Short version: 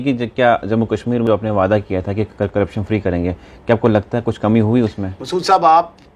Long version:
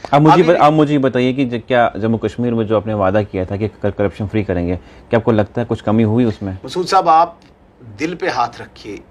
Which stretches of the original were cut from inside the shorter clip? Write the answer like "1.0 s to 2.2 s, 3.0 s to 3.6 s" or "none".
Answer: 2.6 s to 2.7 s